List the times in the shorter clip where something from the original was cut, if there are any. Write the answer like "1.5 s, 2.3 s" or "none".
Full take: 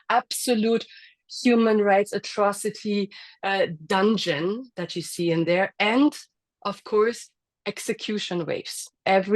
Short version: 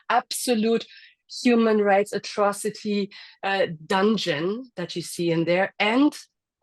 none